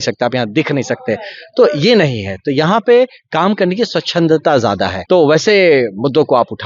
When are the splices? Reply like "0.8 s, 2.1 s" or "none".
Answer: 4.9 s